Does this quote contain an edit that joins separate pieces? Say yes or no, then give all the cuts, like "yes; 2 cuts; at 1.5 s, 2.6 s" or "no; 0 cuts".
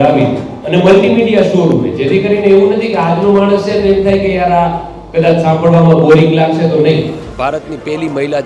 yes; 1 cut; at 7.2 s